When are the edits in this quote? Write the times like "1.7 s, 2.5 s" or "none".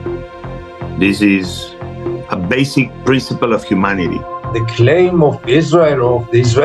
4.3 s

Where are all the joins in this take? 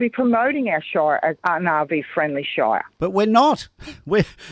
1.4 s

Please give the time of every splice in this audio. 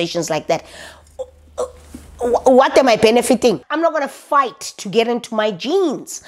3.6 s

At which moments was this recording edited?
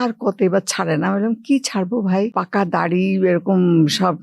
2.4 s

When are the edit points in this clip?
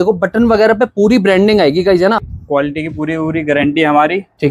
2.3 s

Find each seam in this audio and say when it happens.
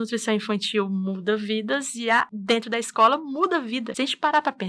2.3 s, 3.9 s

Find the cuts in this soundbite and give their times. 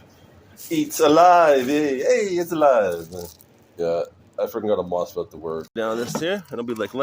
5.7 s

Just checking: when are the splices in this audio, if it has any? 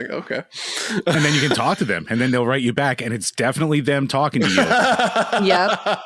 1.1 s

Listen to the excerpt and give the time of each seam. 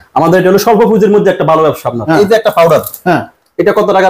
2.0 s

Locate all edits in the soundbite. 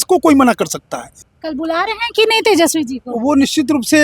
1.2 s

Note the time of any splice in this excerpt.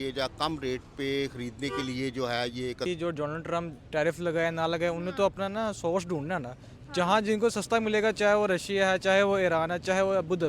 2.9 s

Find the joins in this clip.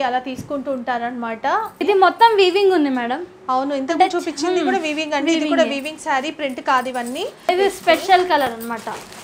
1.7 s, 7.5 s

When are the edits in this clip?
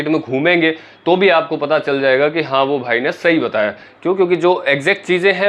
none

